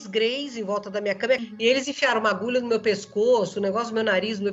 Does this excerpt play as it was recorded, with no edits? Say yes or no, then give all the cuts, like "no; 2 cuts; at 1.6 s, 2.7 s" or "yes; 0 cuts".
no; 1 cut; at 1.4 s